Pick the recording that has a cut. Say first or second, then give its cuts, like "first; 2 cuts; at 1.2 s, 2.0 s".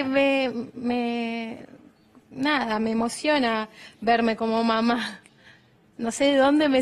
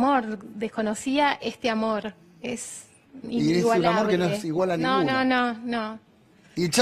first; 1 cut; at 3.3 s